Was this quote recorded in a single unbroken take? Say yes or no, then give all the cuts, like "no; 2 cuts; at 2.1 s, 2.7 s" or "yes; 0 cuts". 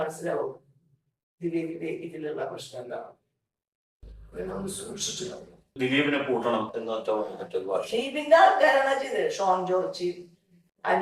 no; 1 cut; at 5.7 s